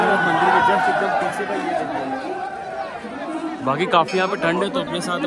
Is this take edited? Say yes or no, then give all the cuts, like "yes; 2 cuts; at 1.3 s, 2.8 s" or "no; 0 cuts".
no; 0 cuts